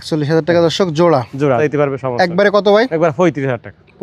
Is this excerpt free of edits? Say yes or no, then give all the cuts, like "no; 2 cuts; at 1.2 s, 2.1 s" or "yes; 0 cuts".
no; 1 cut; at 1.6 s